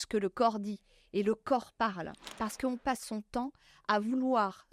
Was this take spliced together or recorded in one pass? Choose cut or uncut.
cut